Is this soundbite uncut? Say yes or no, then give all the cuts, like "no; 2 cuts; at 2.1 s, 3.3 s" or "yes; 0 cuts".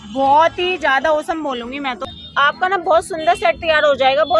no; 1 cut; at 2.1 s